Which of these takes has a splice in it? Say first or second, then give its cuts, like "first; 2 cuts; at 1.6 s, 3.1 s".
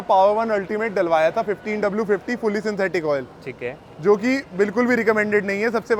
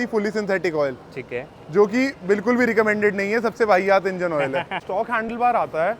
second; 1 cut; at 4.8 s